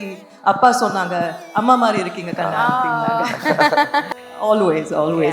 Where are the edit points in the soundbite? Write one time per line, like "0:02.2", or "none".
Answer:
0:04.1